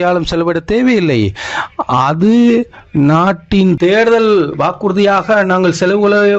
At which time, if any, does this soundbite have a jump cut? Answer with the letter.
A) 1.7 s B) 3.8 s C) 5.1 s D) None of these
B